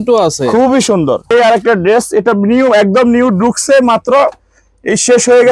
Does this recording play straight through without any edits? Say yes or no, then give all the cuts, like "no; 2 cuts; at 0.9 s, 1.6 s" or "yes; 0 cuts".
no; 1 cut; at 1.3 s